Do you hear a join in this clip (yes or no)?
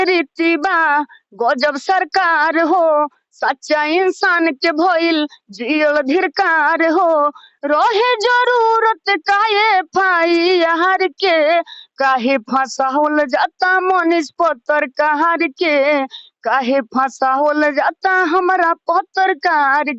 no